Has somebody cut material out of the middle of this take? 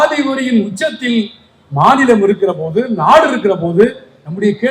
no; 0 cuts

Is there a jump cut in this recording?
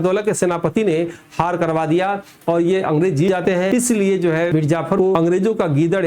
yes; 2 cuts; at 3.3 s, 4.9 s

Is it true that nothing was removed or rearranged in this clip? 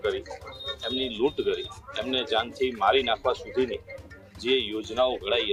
yes; 0 cuts

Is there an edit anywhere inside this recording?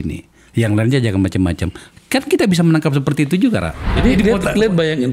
yes; 1 cut; at 3.9 s

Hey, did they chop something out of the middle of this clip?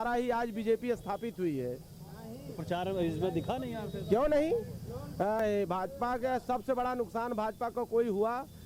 yes; 1 cut; at 5.4 s

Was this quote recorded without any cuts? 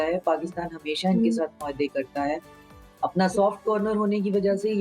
yes; 0 cuts

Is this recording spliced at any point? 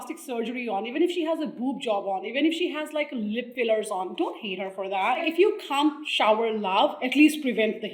yes; 4 cuts; at 3.5 s, 5.2 s, 6.1 s, 7.0 s

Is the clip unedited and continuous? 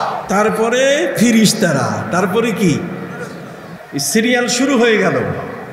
yes; 0 cuts

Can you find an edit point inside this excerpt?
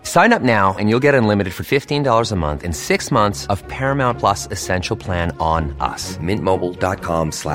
no; 0 cuts

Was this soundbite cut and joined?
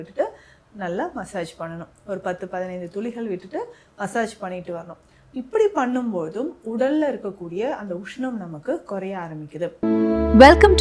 yes; 1 cut; at 9.7 s

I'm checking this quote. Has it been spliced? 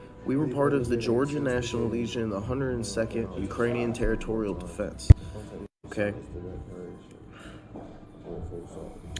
no; 0 cuts

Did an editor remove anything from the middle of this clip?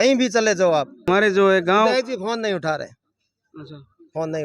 yes; 1 cut; at 1.0 s

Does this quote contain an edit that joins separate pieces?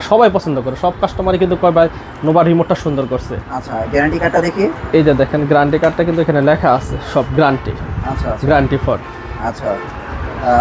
no; 0 cuts

